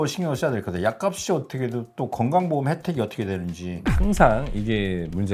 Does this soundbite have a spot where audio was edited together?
no; 0 cuts

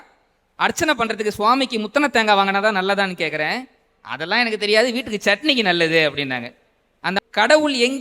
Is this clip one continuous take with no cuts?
no; 1 cut; at 7.0 s

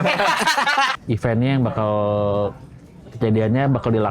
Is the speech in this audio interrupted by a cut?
yes; 1 cut; at 0.9 s

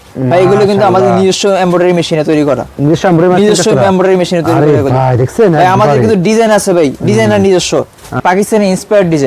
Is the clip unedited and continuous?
no; 1 cut; at 8.2 s

